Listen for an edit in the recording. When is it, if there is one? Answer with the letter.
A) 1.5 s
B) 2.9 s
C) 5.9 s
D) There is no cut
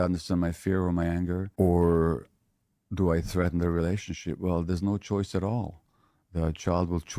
A